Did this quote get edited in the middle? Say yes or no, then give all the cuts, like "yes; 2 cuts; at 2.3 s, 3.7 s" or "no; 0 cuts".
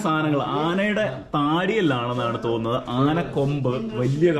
no; 0 cuts